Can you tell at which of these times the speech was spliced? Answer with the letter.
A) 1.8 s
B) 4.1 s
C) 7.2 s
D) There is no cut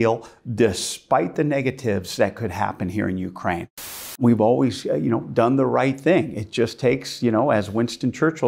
B